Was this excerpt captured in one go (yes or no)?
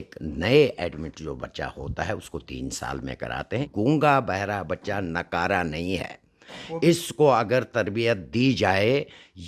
no